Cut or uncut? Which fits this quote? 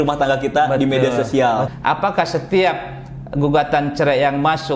cut